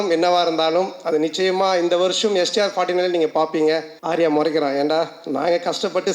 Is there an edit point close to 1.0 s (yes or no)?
no